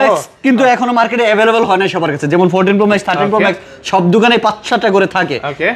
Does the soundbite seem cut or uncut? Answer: uncut